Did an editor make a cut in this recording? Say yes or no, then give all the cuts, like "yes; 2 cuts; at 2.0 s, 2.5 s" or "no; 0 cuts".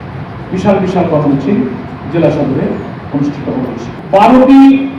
yes; 1 cut; at 3.9 s